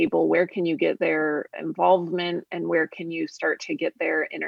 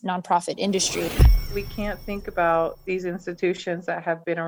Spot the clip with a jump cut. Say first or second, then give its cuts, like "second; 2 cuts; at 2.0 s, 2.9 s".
second; 1 cut; at 1.2 s